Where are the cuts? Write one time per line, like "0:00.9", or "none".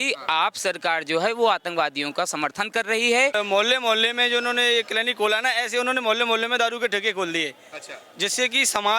0:03.3